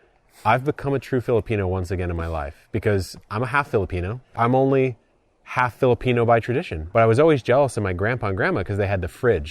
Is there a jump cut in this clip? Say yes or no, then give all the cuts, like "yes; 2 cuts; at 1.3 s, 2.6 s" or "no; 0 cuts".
yes; 2 cuts; at 4.4 s, 6.7 s